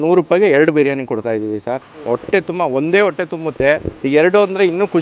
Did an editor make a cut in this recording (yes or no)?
yes